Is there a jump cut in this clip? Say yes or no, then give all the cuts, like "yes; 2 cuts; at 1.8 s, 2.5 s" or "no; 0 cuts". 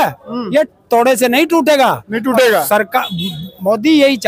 no; 0 cuts